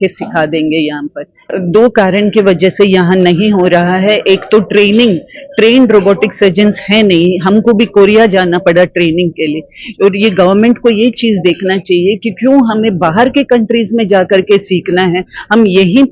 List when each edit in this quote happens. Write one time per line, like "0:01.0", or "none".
0:01.5

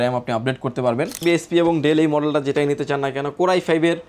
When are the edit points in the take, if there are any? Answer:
0:01.2

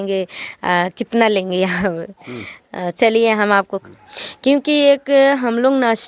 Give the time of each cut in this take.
0:03.8

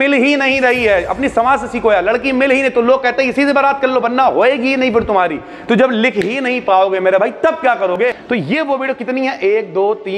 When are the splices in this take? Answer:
0:08.0

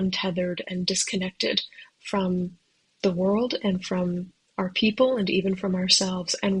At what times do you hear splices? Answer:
none

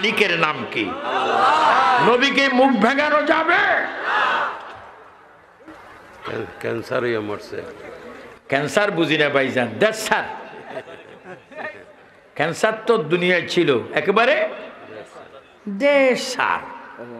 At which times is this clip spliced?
0:01.7

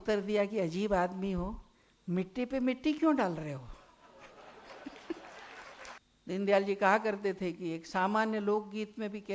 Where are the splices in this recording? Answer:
0:06.0

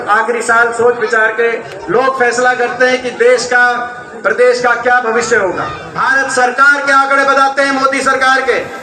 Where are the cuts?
0:05.8

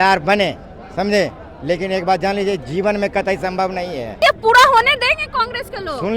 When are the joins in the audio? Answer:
0:04.1

